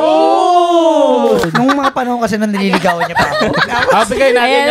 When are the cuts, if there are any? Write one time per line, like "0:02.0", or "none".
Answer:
0:01.4